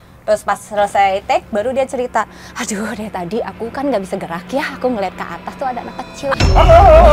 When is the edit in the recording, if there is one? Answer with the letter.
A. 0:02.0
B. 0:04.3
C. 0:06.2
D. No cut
D